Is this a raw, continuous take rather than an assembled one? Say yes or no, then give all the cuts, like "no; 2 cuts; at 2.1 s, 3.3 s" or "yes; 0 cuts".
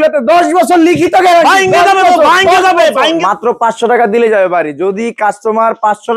no; 1 cut; at 3.2 s